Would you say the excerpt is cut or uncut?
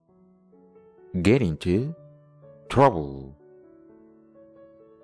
uncut